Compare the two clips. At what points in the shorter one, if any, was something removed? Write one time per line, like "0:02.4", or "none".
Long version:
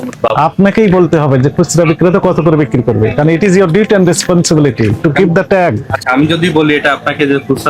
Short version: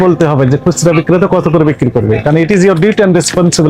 none